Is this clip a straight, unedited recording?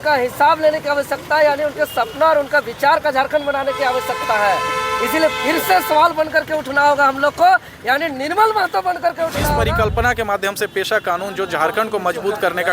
no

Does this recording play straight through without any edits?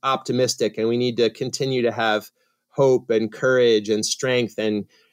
yes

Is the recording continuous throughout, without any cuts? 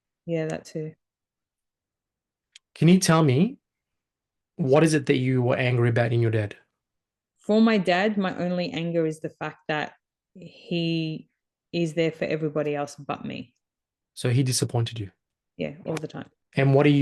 yes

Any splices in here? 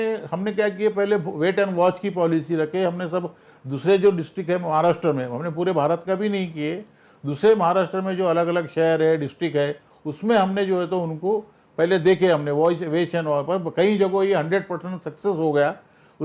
no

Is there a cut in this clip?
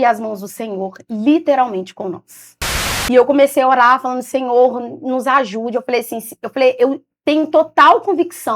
yes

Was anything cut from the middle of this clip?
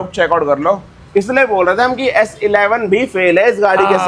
no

